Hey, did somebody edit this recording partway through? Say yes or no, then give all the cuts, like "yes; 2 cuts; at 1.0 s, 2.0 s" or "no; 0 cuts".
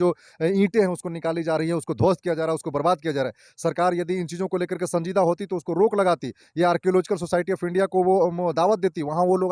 no; 0 cuts